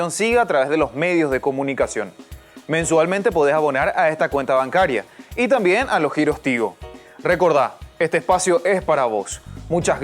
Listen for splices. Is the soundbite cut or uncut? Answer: uncut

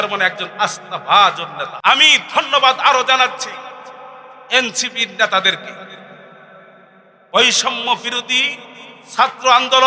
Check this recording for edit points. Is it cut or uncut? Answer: cut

